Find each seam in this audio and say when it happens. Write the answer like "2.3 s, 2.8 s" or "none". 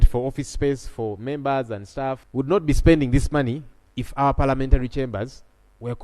2.2 s